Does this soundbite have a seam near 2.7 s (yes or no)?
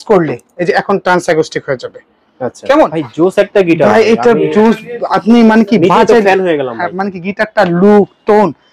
yes